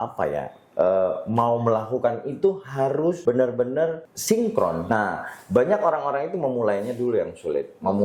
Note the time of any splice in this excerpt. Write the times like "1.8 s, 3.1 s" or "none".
3.2 s, 4.1 s, 4.8 s